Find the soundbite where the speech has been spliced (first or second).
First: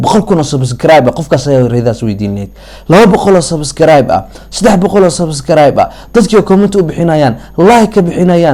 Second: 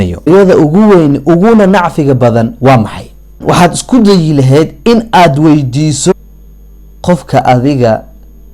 second